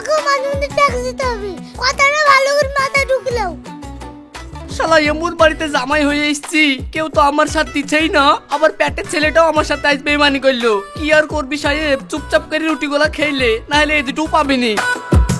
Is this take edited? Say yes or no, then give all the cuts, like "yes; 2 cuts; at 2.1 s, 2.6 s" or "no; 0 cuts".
no; 0 cuts